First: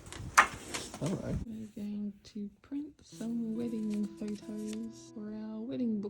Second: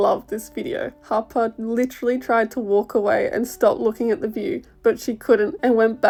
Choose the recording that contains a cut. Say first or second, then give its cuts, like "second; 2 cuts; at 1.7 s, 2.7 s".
first; 2 cuts; at 1.4 s, 5.0 s